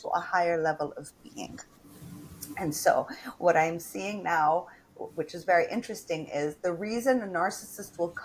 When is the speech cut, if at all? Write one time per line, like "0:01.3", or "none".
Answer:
none